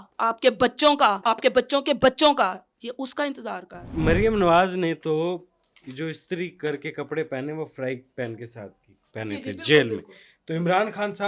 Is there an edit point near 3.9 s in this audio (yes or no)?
yes